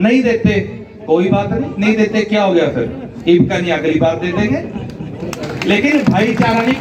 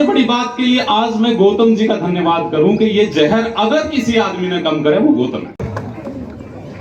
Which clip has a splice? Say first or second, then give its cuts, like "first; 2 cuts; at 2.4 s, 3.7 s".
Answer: second; 1 cut; at 5.6 s